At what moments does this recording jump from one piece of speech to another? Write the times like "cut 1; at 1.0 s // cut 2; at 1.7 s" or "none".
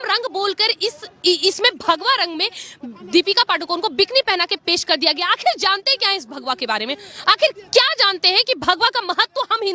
none